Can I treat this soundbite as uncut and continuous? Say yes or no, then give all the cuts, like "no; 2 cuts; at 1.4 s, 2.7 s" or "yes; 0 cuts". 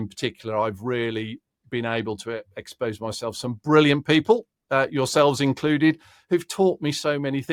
yes; 0 cuts